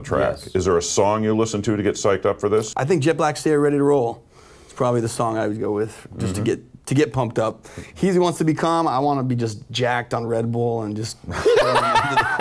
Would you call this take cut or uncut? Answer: cut